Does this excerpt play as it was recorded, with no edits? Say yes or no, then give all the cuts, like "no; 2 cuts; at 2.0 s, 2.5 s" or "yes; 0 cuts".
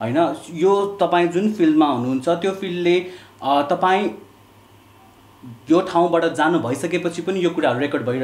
yes; 0 cuts